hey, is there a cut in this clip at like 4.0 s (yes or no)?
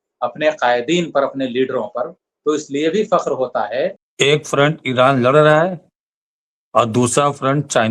yes